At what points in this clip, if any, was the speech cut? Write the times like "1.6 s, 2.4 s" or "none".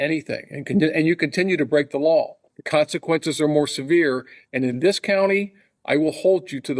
2.4 s